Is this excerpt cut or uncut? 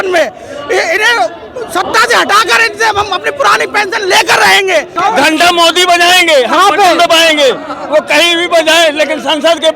cut